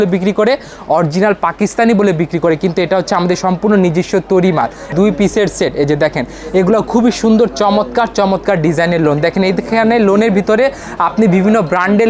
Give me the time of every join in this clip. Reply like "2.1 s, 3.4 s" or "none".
4.9 s